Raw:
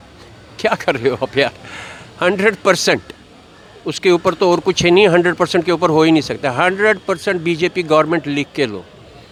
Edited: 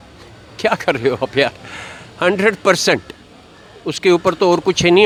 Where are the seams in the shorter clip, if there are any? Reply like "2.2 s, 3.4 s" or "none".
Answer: none